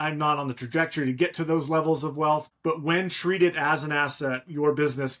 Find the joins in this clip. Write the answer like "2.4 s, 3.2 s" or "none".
2.5 s